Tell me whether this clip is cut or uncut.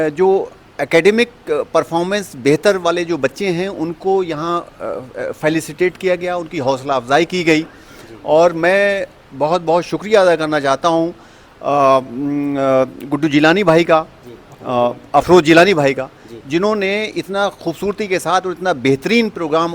uncut